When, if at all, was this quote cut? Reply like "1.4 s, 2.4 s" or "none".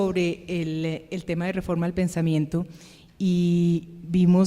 2.5 s